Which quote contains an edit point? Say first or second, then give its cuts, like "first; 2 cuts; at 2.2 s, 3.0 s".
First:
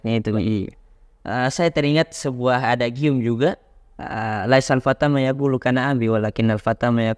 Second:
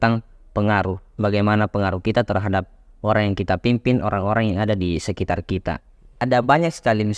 second; 1 cut; at 6.1 s